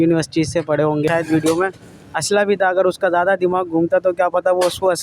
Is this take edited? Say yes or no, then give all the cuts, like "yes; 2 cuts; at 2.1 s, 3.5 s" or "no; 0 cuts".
yes; 1 cut; at 1.1 s